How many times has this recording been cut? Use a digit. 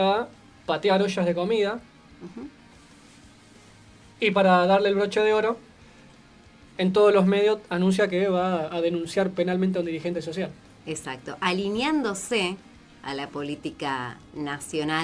0